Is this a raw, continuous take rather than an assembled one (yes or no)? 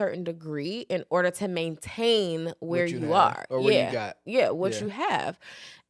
yes